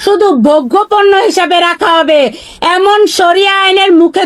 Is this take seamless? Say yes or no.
yes